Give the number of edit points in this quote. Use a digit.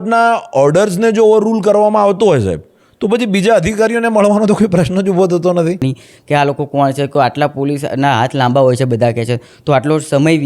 1